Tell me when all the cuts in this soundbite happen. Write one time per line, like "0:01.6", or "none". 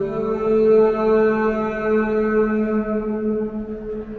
none